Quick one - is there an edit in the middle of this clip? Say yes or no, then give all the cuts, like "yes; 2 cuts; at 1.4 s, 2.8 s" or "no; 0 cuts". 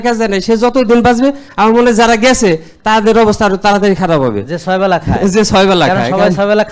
no; 0 cuts